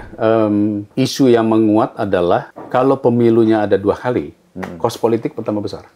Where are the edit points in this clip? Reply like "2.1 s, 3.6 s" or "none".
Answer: 0.8 s, 2.6 s